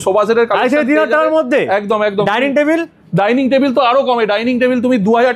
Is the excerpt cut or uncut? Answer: uncut